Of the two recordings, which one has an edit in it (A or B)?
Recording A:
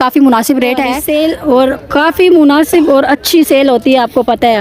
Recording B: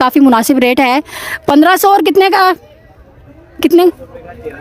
A